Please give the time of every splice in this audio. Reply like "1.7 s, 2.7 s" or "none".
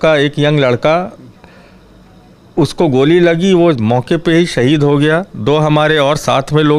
none